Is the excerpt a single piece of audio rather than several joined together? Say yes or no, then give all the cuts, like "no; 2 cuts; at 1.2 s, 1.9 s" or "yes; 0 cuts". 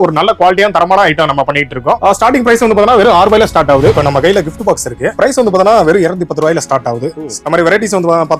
no; 4 cuts; at 2.0 s, 3.9 s, 5.1 s, 7.3 s